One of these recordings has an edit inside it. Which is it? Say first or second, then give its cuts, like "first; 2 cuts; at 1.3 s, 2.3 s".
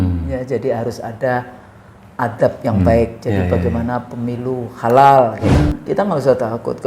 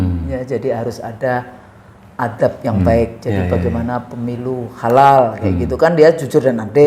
first; 1 cut; at 5.6 s